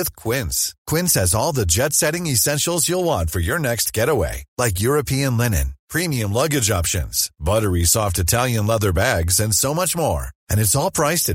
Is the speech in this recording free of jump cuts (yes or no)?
yes